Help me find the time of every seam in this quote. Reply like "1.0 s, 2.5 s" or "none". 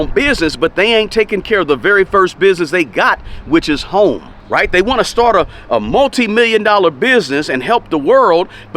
none